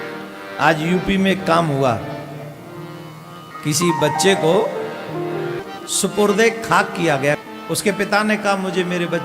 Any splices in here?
yes; 3 cuts; at 3.5 s, 5.6 s, 7.4 s

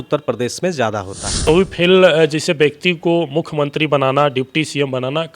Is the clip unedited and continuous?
no; 1 cut; at 1.5 s

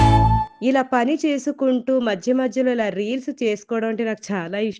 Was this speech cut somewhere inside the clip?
no; 0 cuts

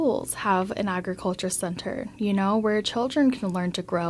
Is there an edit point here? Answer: no; 0 cuts

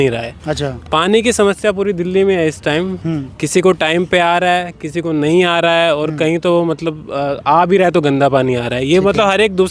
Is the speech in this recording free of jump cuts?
yes; 0 cuts

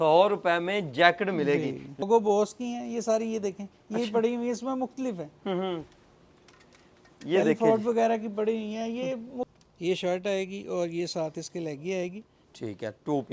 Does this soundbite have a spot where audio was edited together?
yes; 2 cuts; at 2.0 s, 9.5 s

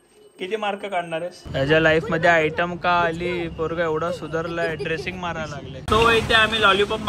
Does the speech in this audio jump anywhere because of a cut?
yes; 2 cuts; at 1.5 s, 5.8 s

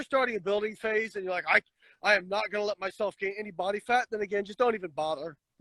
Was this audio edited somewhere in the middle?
no; 0 cuts

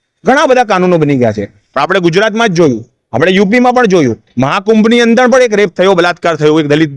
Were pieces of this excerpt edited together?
no; 0 cuts

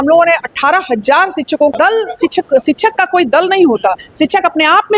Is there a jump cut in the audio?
yes; 1 cut; at 1.7 s

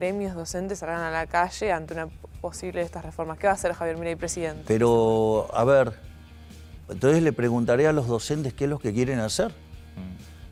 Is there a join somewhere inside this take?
no; 0 cuts

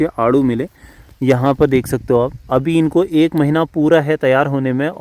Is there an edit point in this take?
no; 0 cuts

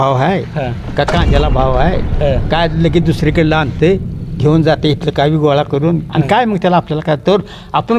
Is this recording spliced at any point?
no; 0 cuts

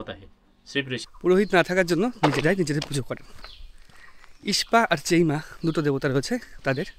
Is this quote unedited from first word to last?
no; 1 cut; at 1.0 s

